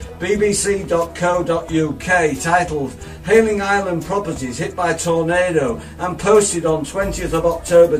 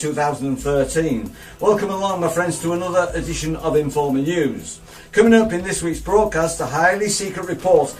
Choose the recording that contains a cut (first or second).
second